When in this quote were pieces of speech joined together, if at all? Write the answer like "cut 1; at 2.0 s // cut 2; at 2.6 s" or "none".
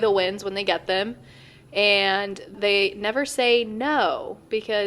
cut 1; at 2.5 s